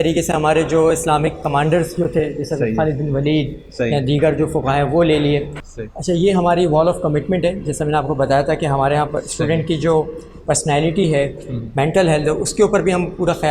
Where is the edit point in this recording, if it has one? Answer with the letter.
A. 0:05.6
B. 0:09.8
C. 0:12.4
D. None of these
A